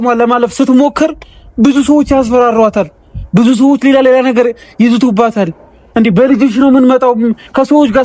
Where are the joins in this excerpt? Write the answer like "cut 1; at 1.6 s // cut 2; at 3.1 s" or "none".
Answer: none